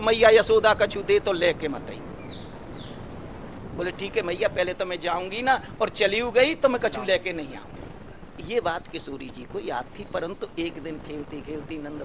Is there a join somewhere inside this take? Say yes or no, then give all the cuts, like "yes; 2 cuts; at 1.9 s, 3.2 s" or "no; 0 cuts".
no; 0 cuts